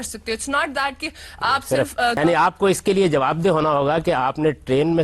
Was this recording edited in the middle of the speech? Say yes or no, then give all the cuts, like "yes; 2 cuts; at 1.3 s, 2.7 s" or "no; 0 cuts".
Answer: yes; 1 cut; at 2.2 s